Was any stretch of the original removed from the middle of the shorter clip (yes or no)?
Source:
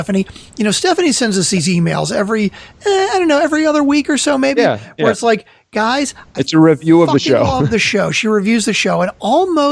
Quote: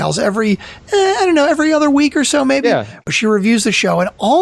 yes